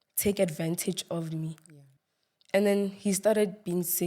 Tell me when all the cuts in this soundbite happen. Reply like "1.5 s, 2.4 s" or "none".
1.8 s